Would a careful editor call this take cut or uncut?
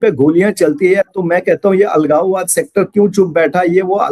uncut